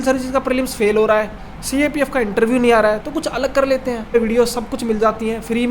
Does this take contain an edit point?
yes; 1 cut; at 4.1 s

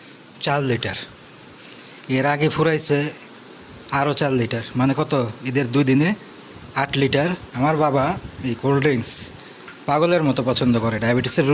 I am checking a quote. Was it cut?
yes; 1 cut; at 7.5 s

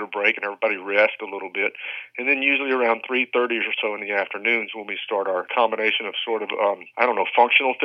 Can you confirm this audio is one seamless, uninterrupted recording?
no; 2 cuts; at 5.5 s, 6.9 s

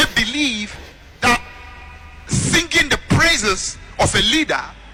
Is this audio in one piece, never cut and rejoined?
yes; 0 cuts

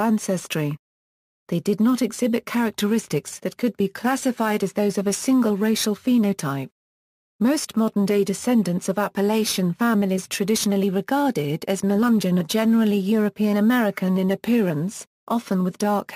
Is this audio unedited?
no; 1 cut; at 8.4 s

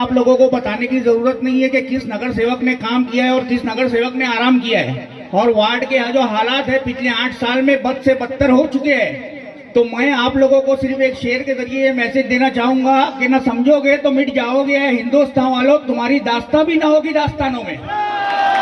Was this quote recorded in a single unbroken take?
yes; 0 cuts

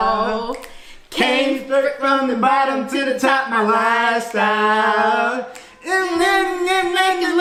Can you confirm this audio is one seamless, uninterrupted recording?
yes; 0 cuts

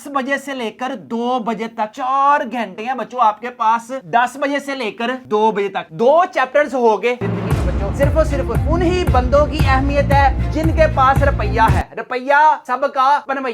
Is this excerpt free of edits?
no; 2 cuts; at 4.0 s, 7.2 s

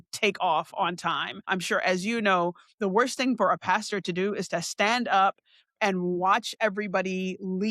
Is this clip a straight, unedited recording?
no; 1 cut; at 1.5 s

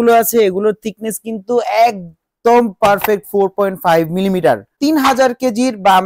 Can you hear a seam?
yes; 1 cut; at 4.7 s

